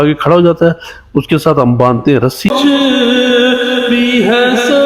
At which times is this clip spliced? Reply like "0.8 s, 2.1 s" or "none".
2.5 s

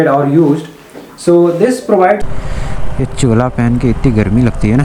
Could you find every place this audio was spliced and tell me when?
2.2 s

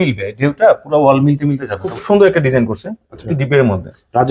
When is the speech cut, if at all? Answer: 1.9 s

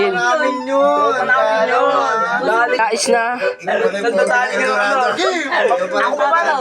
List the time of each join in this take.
2.8 s

